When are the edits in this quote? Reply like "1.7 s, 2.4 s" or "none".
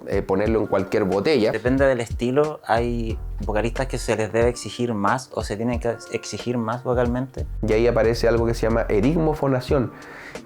1.6 s, 7.4 s